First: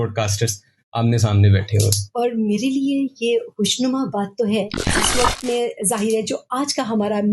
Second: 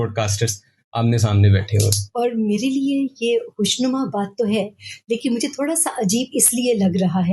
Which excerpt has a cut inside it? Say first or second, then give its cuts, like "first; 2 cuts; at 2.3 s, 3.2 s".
first; 1 cut; at 5.0 s